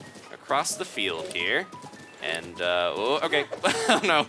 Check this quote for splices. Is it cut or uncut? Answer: uncut